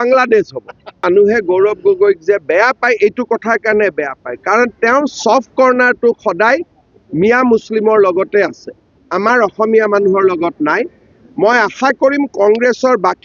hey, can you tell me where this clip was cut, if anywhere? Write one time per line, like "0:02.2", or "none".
0:01.0